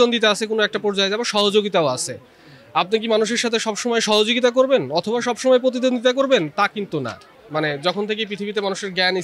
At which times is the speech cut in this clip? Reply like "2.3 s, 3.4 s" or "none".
7.4 s